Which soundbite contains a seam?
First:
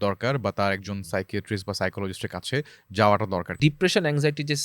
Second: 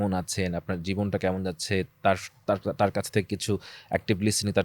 first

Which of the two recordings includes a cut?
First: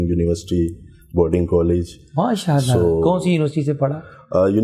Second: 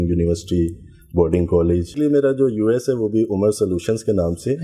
second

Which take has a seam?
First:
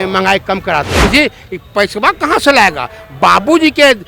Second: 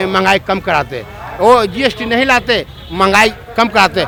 first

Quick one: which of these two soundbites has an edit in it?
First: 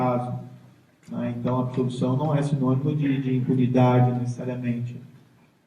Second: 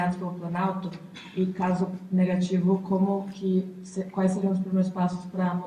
first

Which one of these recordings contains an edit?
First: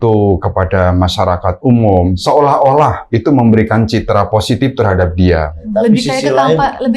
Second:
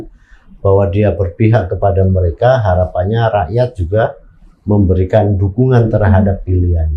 first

